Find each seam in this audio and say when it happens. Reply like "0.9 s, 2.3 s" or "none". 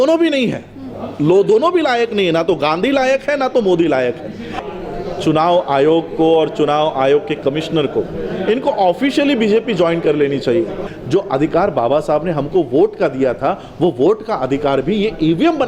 4.6 s, 10.9 s